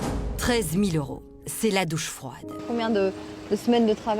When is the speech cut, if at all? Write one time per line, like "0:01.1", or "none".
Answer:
0:02.6